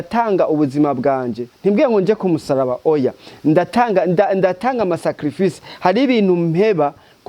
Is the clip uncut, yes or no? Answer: yes